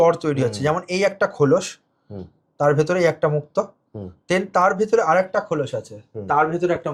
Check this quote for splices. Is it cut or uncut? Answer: uncut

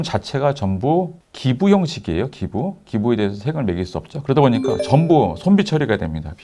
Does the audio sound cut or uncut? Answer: uncut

